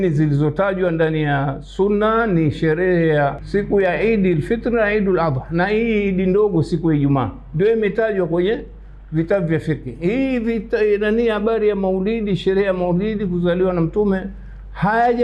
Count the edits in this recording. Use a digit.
1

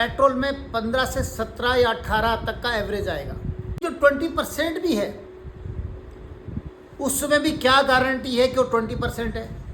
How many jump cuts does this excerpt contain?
1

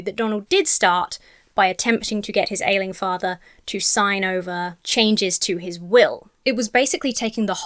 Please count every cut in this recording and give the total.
2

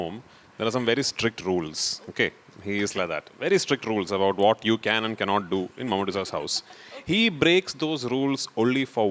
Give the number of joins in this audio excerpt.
0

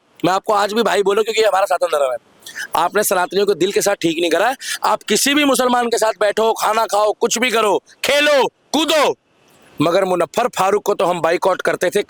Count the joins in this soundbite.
0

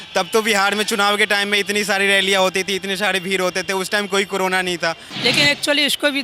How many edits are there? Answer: 1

